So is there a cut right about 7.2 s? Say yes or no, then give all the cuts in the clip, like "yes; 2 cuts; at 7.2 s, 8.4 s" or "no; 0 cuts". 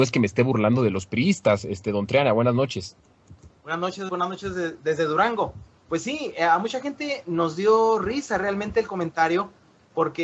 yes; 1 cut; at 7.2 s